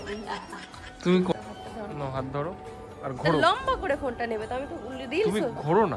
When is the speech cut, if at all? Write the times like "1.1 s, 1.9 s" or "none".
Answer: 1.3 s